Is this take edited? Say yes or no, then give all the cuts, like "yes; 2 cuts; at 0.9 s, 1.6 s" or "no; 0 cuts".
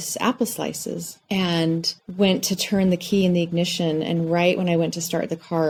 no; 0 cuts